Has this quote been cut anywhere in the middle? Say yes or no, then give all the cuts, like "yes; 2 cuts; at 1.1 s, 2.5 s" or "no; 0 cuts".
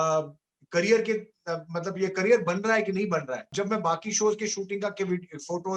yes; 1 cut; at 3.5 s